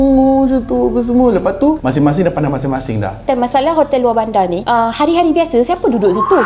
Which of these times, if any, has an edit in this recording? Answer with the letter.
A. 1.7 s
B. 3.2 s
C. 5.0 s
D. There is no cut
B